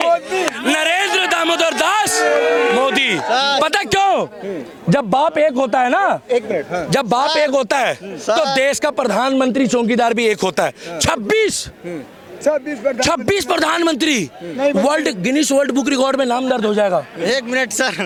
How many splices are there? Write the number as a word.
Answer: zero